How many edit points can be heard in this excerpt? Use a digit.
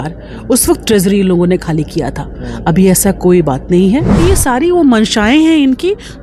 1